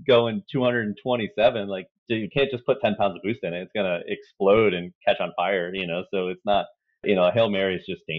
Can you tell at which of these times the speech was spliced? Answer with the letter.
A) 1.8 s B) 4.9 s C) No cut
A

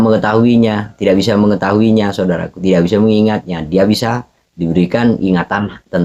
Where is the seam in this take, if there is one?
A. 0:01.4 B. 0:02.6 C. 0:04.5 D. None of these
D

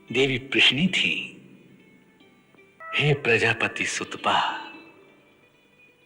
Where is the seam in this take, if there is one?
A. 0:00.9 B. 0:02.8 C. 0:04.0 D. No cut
B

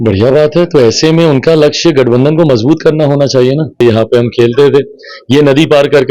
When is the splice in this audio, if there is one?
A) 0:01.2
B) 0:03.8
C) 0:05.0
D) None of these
B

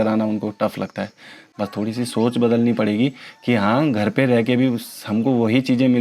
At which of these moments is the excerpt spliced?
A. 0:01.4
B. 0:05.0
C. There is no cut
A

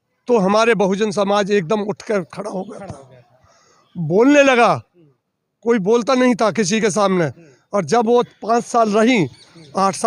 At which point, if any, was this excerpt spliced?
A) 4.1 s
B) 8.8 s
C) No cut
C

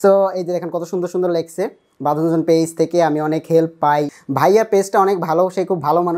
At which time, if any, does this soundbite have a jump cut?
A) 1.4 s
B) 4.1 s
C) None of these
B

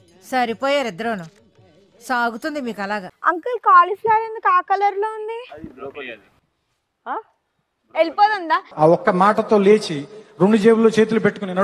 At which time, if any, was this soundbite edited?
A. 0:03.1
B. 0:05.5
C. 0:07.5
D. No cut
A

